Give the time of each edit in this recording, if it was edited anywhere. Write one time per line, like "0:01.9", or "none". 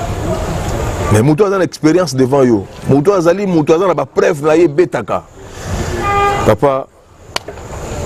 none